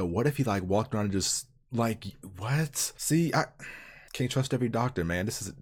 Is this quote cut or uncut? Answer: uncut